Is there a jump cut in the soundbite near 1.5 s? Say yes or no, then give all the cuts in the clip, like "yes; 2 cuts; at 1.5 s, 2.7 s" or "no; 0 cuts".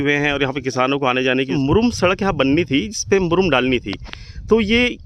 yes; 1 cut; at 1.5 s